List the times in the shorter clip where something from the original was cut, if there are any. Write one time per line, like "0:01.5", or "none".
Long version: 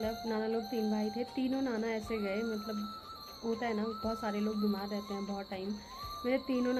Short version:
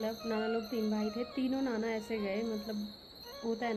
none